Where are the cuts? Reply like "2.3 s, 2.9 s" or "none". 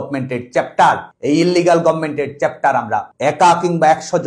3.1 s